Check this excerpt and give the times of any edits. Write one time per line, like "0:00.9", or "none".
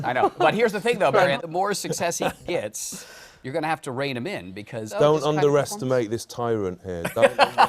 0:04.9